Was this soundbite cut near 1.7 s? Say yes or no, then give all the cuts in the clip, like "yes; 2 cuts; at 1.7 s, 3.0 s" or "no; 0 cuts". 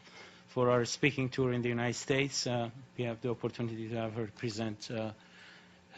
no; 0 cuts